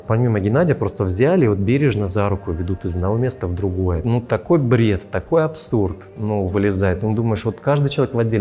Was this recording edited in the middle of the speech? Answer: yes; 1 cut; at 4.0 s

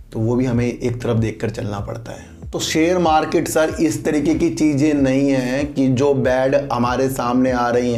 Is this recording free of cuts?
yes; 0 cuts

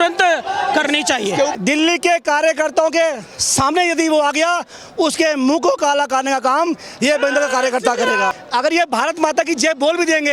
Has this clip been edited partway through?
yes; 2 cuts; at 1.5 s, 8.3 s

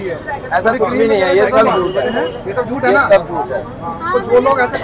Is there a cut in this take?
no; 0 cuts

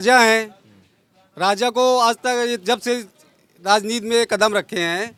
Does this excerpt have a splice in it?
no; 0 cuts

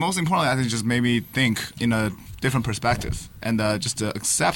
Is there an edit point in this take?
yes; 1 cut; at 1.7 s

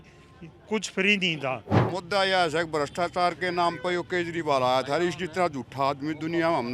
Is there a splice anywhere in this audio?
yes; 1 cut; at 1.9 s

